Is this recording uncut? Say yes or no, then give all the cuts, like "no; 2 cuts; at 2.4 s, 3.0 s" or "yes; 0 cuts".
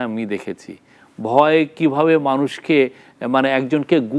yes; 0 cuts